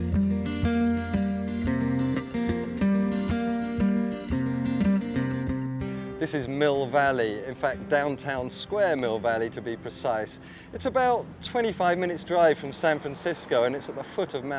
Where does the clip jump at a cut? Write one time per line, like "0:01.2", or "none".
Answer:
0:06.9